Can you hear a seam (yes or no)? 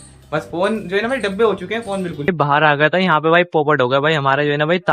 yes